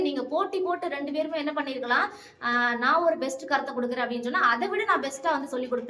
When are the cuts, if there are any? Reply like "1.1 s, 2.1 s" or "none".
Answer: none